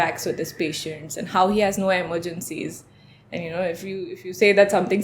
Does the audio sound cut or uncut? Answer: uncut